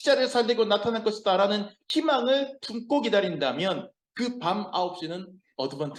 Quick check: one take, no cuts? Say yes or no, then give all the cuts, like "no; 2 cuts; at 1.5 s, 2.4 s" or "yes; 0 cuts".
yes; 0 cuts